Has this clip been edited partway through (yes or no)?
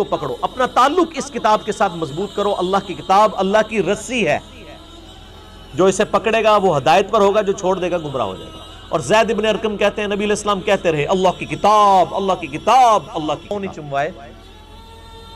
yes